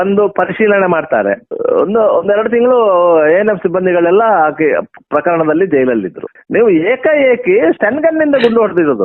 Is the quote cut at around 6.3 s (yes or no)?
yes